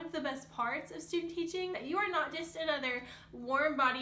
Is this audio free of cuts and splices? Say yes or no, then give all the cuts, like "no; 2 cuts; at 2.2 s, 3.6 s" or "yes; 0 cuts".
no; 1 cut; at 1.8 s